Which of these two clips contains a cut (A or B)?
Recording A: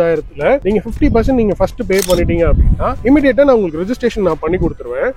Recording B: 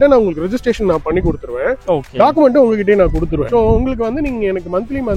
B